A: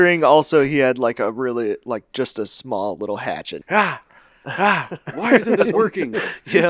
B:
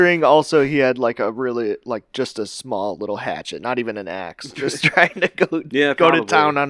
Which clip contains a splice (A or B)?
A